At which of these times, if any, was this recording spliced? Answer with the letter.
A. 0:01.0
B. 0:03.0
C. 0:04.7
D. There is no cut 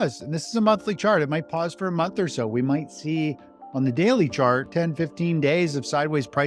C